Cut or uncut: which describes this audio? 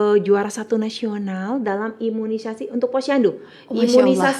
uncut